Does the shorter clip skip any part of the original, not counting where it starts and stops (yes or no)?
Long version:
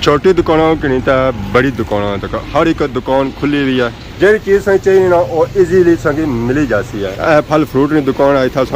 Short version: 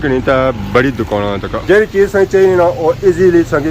yes